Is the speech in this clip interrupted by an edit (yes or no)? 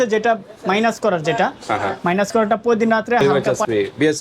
yes